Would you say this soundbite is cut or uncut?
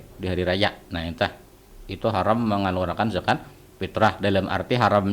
uncut